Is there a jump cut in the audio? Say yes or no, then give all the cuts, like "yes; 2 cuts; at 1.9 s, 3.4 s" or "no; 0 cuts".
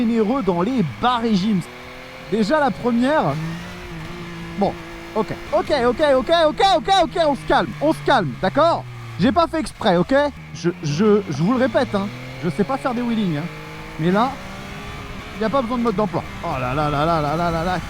yes; 4 cuts; at 1.7 s, 5.4 s, 10.5 s, 16.3 s